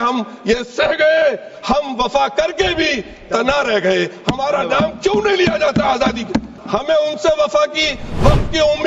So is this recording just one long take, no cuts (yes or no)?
no